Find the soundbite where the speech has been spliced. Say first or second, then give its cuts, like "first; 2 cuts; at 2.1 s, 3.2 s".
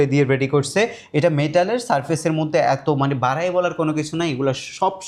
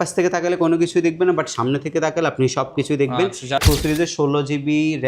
second; 1 cut; at 3.6 s